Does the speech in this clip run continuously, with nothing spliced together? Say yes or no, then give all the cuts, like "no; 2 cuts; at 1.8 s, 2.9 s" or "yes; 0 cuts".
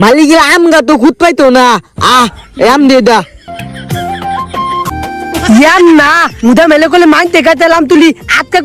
no; 1 cut; at 4.9 s